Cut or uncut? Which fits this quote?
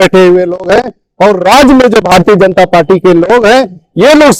uncut